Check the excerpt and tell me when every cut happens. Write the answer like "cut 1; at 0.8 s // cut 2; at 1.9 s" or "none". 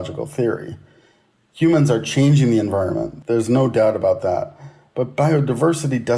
cut 1; at 3.1 s